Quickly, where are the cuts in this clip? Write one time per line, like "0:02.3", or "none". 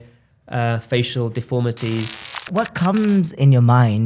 0:02.4